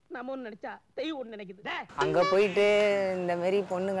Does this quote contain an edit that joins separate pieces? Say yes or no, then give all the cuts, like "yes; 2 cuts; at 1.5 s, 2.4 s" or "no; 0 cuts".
yes; 1 cut; at 1.8 s